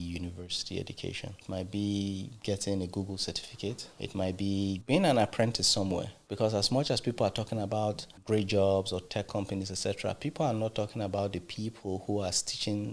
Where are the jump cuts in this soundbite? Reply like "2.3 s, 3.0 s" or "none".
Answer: 1.4 s, 3.9 s, 4.8 s, 6.2 s, 8.1 s